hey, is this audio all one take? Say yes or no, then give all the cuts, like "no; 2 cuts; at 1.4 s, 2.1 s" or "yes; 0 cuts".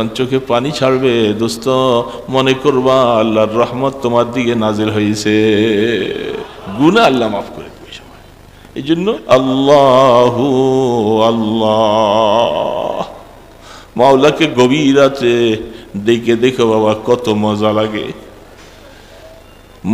no; 1 cut; at 9.2 s